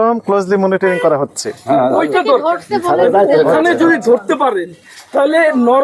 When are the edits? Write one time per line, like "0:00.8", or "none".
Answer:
none